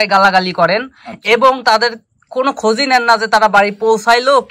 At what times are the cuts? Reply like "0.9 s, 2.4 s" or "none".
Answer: none